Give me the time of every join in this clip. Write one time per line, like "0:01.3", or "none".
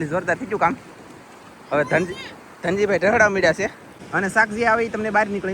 0:03.9